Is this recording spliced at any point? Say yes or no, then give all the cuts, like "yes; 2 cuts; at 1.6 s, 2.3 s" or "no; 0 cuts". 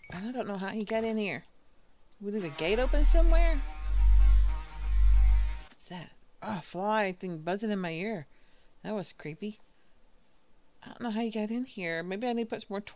yes; 1 cut; at 2.9 s